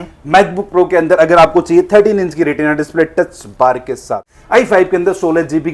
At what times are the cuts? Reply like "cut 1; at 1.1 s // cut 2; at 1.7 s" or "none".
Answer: cut 1; at 4.3 s